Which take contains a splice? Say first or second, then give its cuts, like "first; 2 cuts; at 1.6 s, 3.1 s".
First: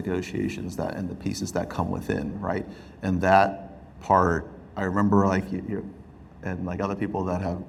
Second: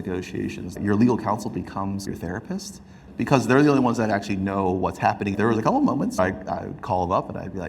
second; 3 cuts; at 0.8 s, 5.3 s, 6.2 s